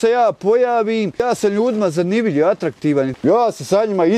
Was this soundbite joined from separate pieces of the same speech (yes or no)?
yes